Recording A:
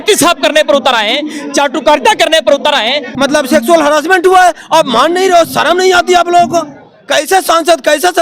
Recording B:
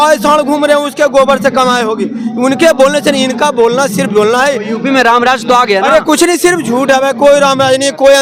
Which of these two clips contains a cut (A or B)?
A